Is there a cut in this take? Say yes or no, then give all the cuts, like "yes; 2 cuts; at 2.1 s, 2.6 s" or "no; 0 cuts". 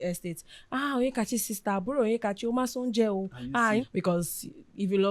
yes; 1 cut; at 3.8 s